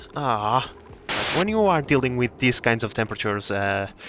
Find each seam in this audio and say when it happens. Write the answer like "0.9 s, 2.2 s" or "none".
1.3 s